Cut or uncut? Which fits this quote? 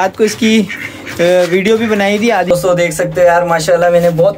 cut